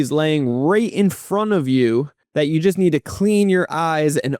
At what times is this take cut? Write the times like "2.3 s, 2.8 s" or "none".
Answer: 2.2 s